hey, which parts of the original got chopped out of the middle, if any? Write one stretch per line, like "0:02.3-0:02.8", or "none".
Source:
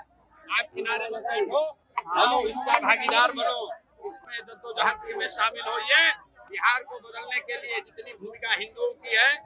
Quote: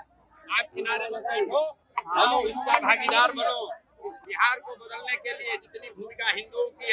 0:04.2-0:06.5